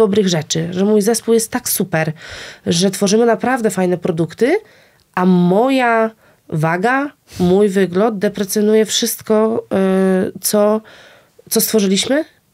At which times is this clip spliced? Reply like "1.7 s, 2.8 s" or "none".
none

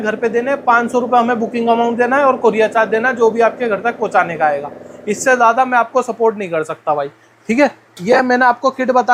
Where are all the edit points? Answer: none

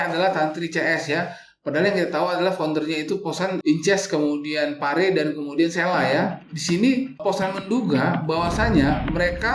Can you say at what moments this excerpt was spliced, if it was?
6.5 s

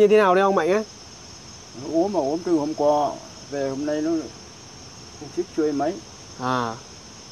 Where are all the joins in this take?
none

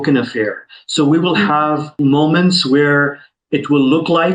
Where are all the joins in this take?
1.9 s

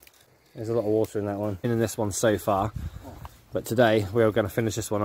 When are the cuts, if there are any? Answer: 1.6 s

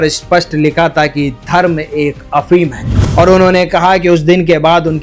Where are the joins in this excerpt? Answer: 3.0 s

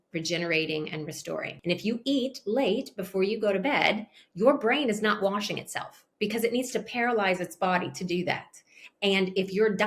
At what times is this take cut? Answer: 1.5 s

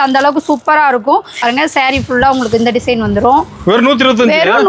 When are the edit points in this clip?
1.4 s

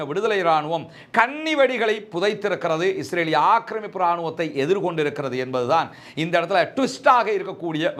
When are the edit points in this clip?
none

